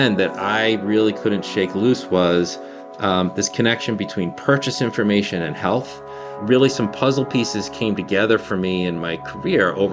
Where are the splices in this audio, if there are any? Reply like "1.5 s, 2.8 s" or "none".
none

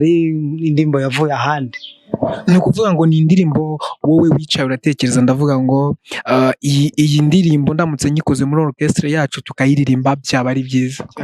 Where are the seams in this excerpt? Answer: none

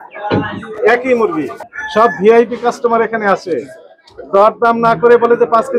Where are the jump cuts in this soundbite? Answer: 1.7 s

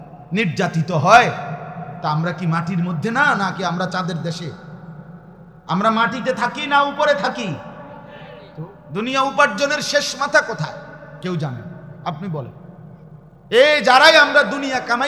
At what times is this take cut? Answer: 8.8 s

